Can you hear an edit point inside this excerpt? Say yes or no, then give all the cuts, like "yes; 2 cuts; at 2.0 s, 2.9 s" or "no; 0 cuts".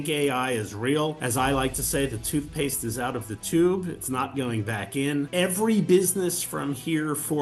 yes; 2 cuts; at 1.2 s, 5.3 s